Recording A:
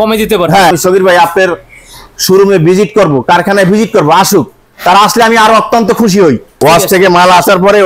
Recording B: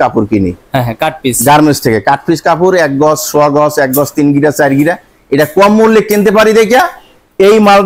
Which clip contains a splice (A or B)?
A